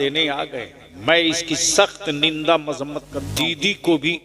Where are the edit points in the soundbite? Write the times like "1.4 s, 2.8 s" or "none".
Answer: 3.2 s